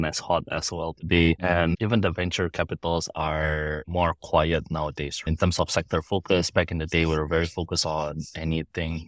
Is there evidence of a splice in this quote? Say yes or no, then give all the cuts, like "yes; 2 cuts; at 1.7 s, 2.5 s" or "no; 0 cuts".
yes; 2 cuts; at 3.8 s, 5.3 s